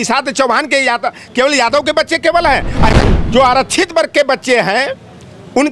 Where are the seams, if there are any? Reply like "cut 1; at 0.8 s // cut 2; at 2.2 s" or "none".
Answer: cut 1; at 2.9 s